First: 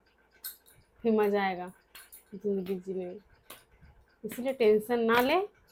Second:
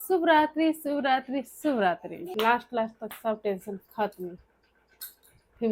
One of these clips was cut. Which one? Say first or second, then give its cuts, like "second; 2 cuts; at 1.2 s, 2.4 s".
second; 1 cut; at 2.2 s